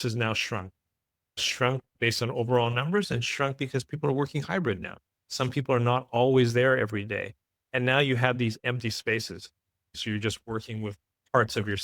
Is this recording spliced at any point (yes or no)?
yes